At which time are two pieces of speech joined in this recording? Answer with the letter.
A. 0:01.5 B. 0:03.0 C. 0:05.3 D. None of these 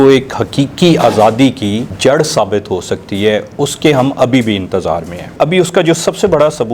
C